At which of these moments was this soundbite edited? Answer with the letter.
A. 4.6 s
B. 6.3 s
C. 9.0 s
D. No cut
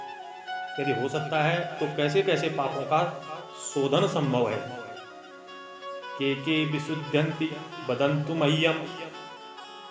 C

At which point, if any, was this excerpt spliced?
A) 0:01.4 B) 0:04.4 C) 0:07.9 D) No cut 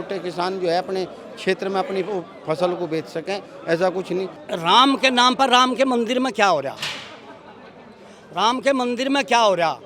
B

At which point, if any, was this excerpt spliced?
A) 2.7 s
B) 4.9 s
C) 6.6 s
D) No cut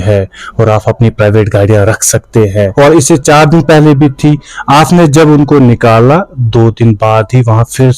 A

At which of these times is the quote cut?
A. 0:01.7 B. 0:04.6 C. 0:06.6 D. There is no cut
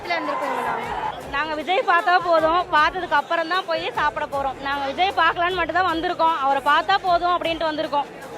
B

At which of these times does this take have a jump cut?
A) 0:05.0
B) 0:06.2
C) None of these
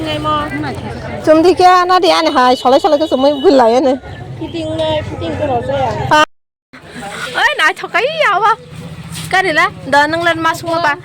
B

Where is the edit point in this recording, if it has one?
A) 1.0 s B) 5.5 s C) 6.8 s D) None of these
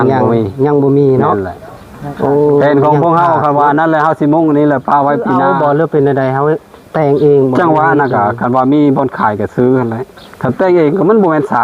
B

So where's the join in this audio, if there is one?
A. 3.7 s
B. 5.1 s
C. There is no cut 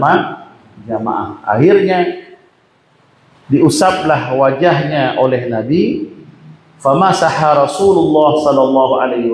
C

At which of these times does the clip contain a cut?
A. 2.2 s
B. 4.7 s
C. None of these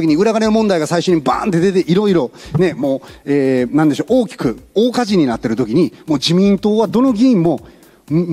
C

